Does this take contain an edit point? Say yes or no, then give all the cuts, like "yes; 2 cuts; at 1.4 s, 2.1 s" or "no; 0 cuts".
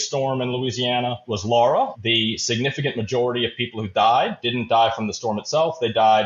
yes; 1 cut; at 1.9 s